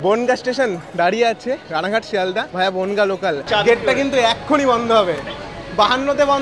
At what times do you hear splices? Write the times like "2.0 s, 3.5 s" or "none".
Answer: 2.5 s, 3.4 s